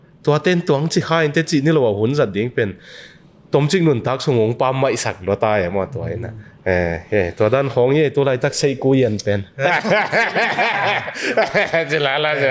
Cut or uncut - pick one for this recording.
uncut